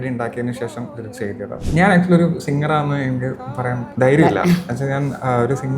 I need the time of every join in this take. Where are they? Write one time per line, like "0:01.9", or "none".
0:01.6
0:03.9

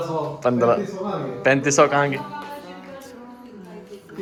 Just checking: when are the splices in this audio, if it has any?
none

